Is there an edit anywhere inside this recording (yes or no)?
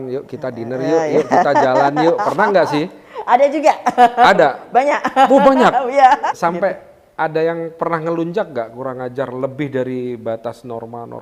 yes